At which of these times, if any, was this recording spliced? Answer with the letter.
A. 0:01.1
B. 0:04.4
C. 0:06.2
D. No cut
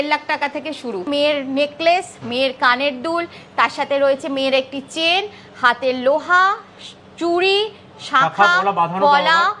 A